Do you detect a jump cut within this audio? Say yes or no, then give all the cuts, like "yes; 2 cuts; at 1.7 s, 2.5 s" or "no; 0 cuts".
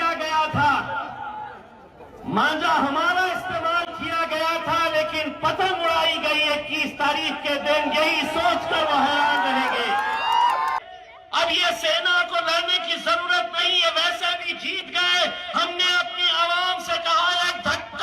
yes; 1 cut; at 10.8 s